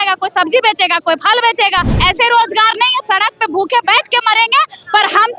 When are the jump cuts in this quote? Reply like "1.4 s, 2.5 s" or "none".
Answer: 1.9 s